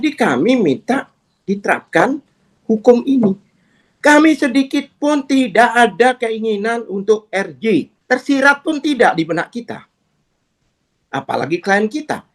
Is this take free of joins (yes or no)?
no